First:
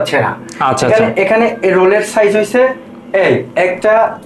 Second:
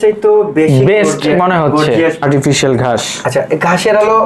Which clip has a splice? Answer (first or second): second